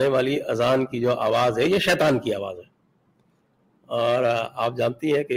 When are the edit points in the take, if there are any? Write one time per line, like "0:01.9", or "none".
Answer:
none